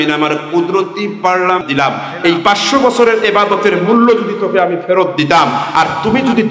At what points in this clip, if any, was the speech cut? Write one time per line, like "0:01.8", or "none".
0:01.6